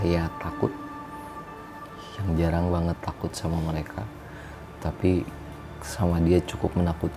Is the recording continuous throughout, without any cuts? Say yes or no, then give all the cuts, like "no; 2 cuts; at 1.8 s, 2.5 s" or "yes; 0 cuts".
yes; 0 cuts